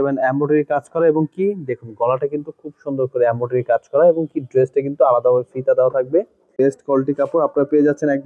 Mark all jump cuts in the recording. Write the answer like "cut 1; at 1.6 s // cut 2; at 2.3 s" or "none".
cut 1; at 6.5 s